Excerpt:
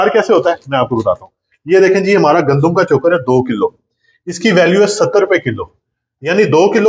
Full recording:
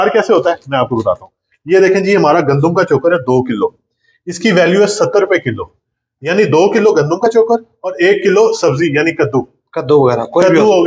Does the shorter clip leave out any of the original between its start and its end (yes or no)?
no